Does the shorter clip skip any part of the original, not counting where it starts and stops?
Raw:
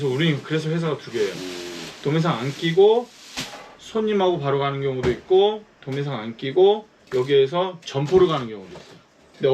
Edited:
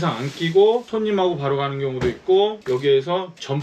yes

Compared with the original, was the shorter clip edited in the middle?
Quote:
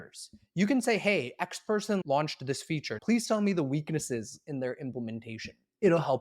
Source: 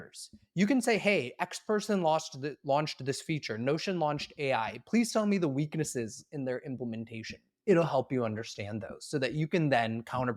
yes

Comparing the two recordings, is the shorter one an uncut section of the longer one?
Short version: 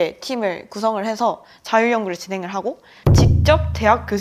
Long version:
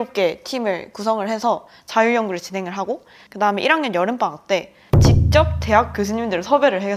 no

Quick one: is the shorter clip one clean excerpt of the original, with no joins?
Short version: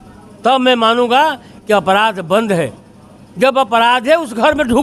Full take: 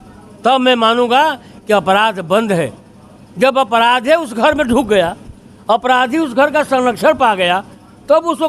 yes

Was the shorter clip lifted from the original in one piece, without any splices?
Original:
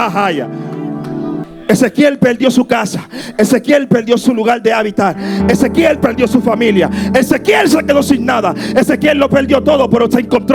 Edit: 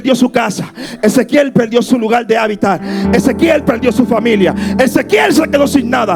yes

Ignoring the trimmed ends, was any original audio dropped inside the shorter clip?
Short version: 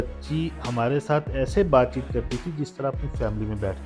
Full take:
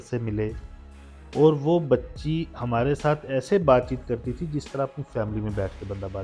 no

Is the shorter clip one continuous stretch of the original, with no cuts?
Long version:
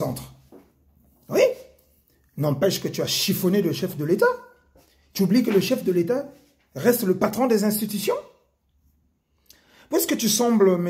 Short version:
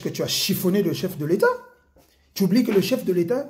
yes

